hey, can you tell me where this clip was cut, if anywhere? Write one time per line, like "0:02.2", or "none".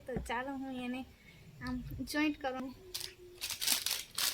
0:02.6